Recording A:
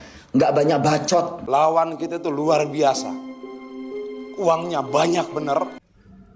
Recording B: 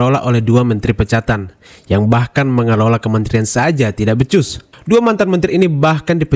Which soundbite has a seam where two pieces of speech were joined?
A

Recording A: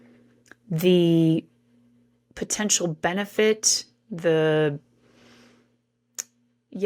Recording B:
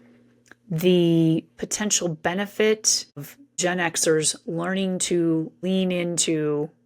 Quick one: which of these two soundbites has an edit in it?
B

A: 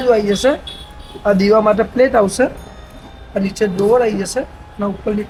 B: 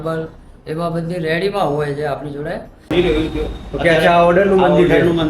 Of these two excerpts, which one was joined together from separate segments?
B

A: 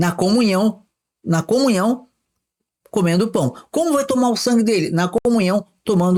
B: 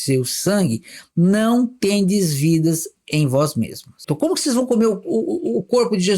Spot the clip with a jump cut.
B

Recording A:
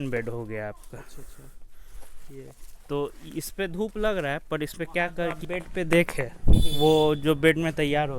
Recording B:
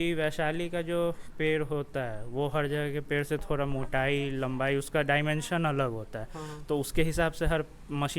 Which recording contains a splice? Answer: A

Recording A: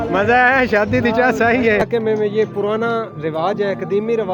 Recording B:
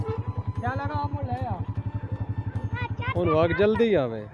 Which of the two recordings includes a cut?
A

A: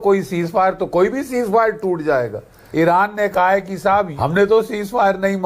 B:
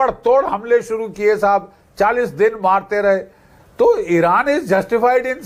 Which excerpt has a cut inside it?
A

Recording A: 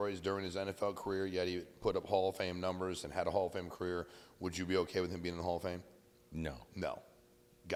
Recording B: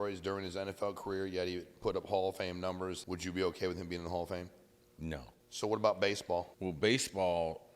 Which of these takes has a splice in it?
B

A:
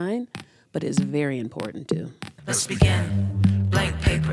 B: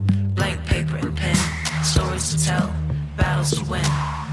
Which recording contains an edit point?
A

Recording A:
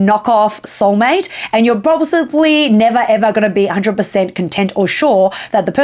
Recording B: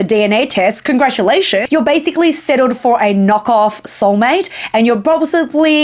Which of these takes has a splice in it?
B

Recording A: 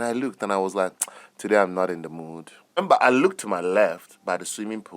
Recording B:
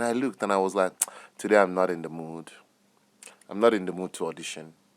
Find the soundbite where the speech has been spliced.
A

